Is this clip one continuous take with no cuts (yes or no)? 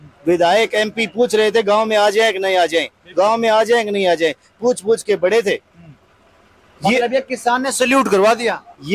yes